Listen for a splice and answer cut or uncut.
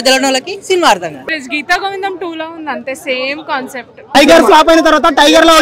cut